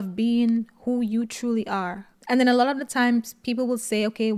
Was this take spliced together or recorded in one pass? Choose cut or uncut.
uncut